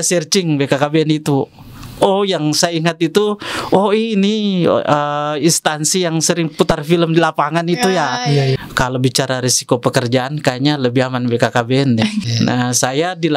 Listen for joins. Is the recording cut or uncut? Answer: cut